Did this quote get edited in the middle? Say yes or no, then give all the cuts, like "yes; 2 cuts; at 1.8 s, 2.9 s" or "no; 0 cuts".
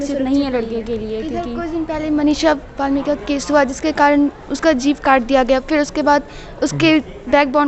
no; 0 cuts